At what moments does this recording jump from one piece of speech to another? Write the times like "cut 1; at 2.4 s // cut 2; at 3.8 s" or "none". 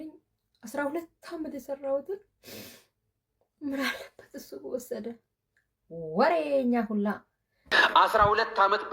cut 1; at 7.6 s